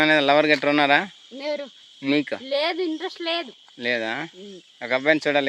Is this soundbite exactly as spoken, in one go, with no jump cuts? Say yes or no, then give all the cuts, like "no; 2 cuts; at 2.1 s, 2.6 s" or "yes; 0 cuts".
yes; 0 cuts